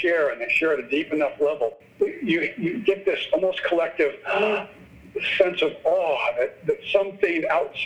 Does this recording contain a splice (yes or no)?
yes